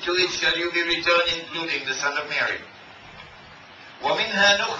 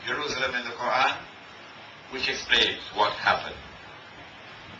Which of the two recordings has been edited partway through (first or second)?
second